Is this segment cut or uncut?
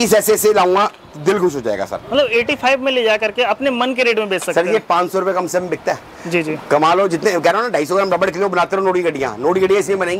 uncut